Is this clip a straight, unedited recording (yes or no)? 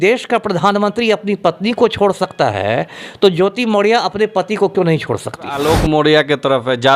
no